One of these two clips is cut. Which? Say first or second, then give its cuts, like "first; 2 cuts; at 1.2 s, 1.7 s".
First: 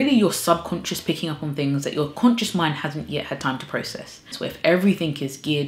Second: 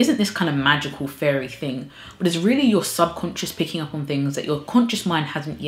first; 1 cut; at 4.3 s